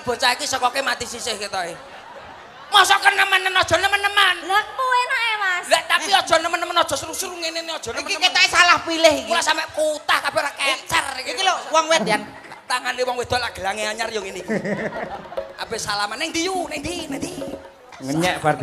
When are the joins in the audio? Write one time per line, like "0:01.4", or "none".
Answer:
0:12.0